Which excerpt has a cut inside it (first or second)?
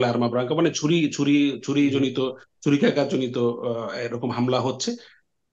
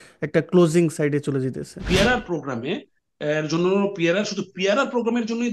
second